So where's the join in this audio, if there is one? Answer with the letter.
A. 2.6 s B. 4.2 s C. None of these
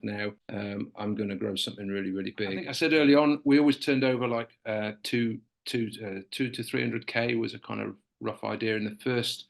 A